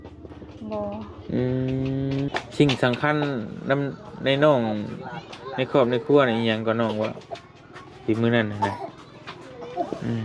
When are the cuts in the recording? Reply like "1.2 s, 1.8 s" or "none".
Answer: 2.3 s